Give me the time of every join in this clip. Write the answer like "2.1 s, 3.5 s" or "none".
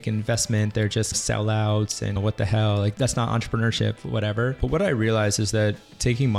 2.9 s

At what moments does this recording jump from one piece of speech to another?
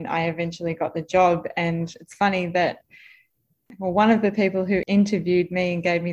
3.6 s, 4.9 s

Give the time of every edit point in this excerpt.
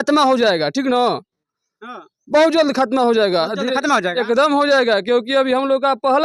none

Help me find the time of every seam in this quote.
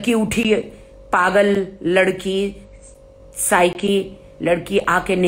none

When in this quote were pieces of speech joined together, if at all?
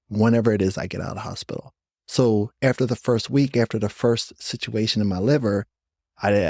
none

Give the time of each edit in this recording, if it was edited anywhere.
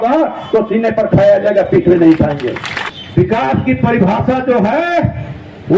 2.7 s

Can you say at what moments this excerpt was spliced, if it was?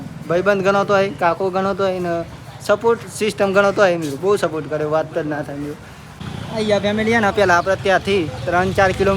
6.2 s

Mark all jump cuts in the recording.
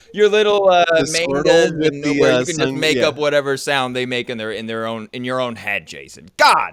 none

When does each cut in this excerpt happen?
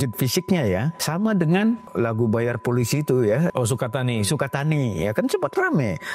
1.0 s, 1.9 s, 3.5 s

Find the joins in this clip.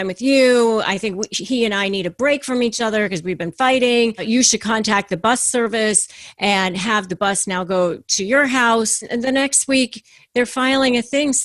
4.2 s, 9.1 s

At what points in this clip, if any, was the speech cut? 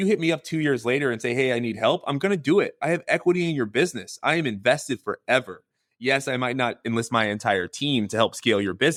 none

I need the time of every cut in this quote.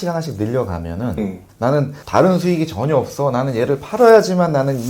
1.8 s

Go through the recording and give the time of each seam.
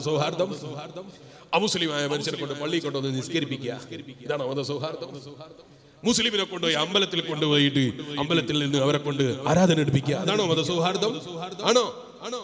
none

